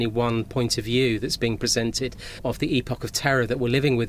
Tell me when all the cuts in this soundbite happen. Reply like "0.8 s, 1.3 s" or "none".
2.4 s